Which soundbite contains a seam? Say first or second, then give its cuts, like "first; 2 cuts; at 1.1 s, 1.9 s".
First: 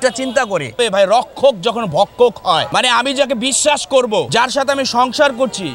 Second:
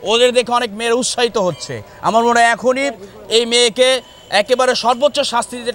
first; 3 cuts; at 0.8 s, 2.7 s, 4.3 s